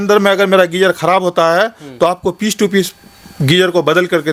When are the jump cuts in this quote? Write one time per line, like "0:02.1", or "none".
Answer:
none